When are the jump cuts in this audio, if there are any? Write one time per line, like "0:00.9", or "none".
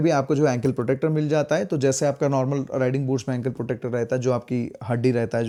none